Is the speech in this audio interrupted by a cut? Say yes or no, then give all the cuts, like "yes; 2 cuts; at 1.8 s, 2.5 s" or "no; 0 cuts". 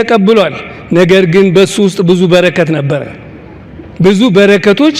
no; 0 cuts